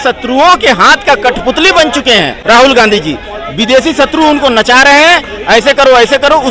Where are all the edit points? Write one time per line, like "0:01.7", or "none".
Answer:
0:02.4